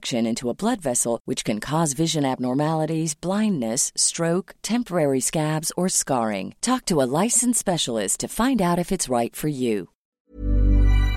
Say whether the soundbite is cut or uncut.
cut